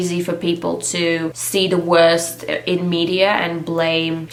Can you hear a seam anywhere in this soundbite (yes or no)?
no